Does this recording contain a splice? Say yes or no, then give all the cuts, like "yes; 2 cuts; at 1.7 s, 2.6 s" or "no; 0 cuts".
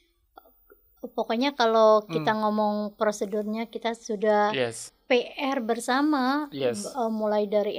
yes; 1 cut; at 4.9 s